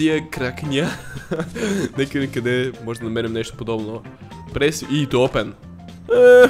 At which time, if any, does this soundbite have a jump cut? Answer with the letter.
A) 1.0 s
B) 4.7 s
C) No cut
C